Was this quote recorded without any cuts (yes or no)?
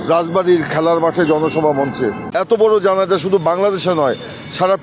no